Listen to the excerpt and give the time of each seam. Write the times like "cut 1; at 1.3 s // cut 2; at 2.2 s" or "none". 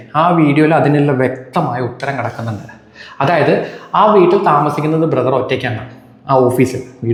none